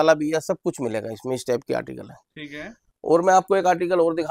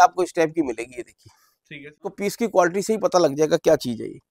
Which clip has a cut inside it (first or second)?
second